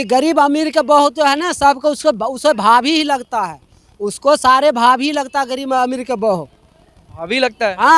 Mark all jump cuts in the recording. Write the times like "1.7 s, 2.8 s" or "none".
none